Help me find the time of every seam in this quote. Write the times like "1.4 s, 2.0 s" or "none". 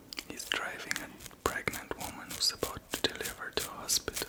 none